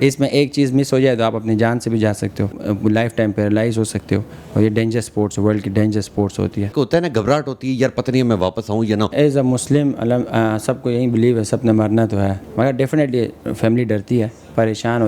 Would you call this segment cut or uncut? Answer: cut